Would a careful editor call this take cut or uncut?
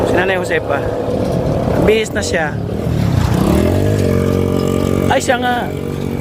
uncut